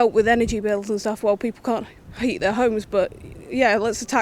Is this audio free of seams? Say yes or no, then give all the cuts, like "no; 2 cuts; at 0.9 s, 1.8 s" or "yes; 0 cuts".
yes; 0 cuts